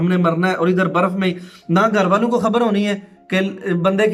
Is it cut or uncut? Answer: uncut